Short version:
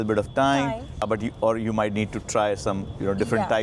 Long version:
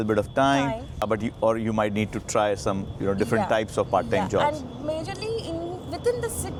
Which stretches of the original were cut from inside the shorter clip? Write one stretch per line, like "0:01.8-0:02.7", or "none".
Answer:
none